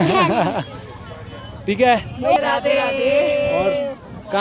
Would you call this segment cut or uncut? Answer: cut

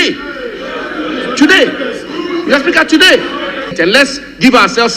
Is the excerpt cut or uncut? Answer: cut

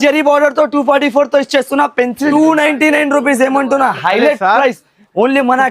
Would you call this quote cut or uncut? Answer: cut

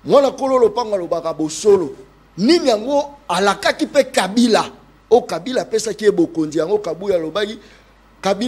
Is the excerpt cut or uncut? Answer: uncut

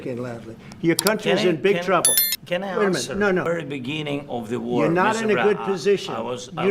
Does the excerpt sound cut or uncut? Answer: cut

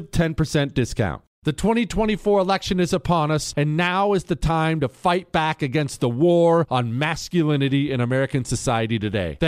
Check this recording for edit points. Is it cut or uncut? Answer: cut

